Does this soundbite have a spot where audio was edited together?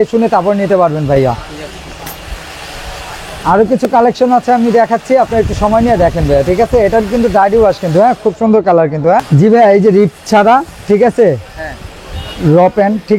no; 0 cuts

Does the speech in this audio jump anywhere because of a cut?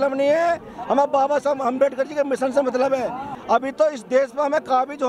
yes; 1 cut; at 3.3 s

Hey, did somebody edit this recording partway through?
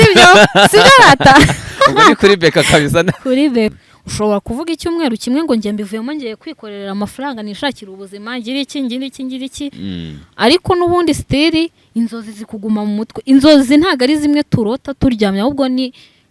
yes; 1 cut; at 3.7 s

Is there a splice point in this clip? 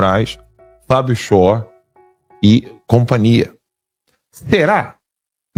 no; 0 cuts

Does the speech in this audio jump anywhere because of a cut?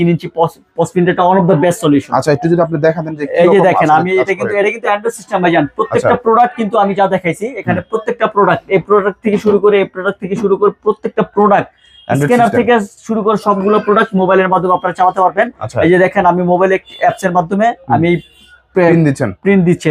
no; 0 cuts

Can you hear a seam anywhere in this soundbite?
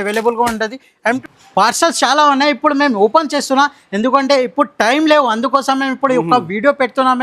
yes; 1 cut; at 1.2 s

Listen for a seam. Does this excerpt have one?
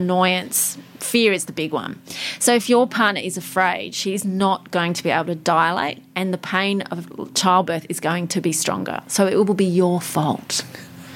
no; 0 cuts

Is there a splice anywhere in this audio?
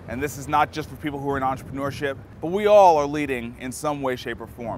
yes; 1 cut; at 2.3 s

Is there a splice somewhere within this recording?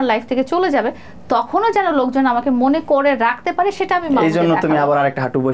no; 0 cuts

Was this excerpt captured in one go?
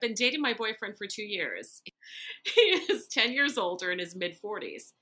no; 1 cut; at 1.8 s

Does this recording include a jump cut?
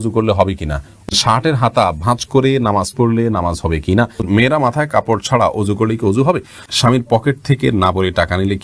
yes; 3 cuts; at 1.1 s, 4.2 s, 6.6 s

